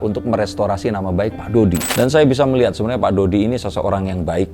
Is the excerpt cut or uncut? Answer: cut